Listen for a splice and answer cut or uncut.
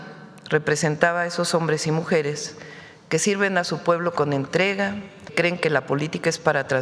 cut